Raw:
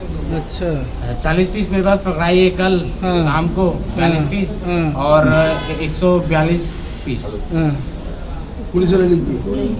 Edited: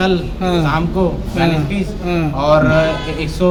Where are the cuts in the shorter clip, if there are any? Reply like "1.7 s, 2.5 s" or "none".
none